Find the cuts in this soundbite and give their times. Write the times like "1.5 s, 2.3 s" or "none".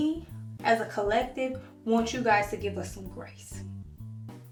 none

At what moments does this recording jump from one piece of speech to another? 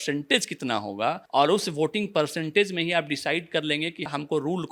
none

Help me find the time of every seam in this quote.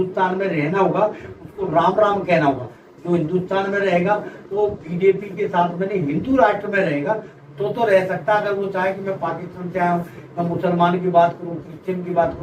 none

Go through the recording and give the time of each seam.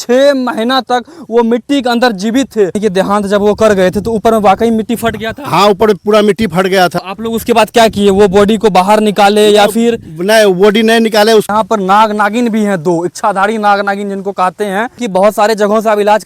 2.8 s, 7.0 s, 11.5 s, 14.9 s

